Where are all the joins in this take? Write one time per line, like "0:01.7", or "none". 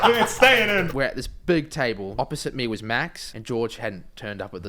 0:00.9
0:02.1
0:03.3